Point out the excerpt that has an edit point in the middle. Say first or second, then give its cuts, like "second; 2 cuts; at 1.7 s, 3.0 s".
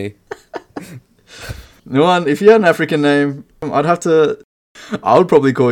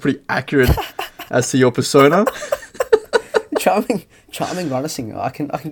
first; 1 cut; at 3.7 s